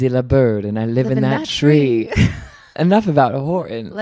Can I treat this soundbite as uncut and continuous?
yes; 0 cuts

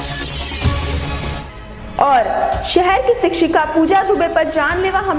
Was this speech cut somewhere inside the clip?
no; 0 cuts

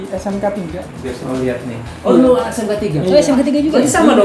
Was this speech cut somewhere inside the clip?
no; 0 cuts

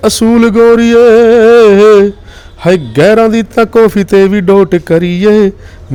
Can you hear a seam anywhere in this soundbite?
no; 0 cuts

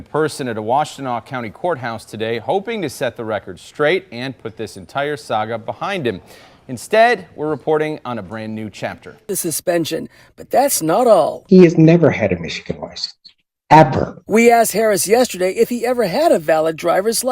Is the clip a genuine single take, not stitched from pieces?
no; 1 cut; at 9.3 s

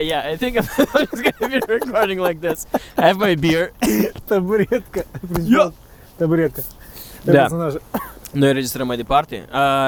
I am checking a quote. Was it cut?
no; 0 cuts

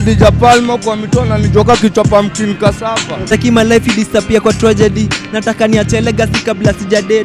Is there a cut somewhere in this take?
yes; 1 cut; at 3.3 s

